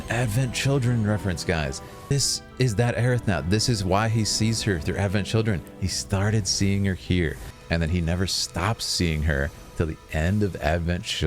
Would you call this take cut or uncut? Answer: cut